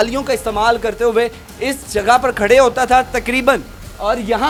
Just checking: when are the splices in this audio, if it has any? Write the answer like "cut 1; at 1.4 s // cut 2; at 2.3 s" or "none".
none